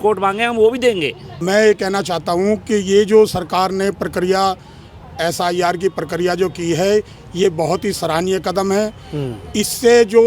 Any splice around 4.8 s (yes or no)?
no